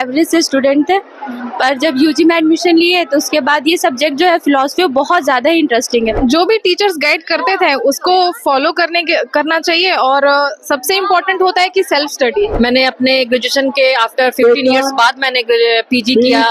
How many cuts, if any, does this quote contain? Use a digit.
2